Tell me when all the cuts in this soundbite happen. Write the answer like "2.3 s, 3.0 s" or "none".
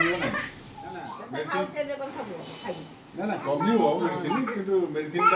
1.1 s